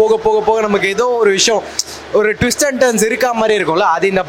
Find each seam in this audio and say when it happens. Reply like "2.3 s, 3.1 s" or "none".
none